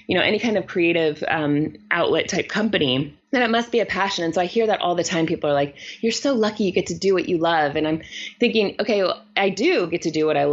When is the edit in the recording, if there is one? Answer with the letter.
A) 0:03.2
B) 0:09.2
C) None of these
A